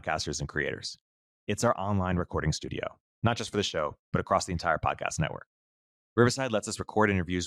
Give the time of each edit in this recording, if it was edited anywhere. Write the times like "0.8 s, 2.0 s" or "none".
none